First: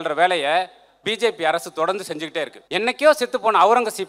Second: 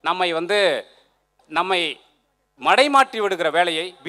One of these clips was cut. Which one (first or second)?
first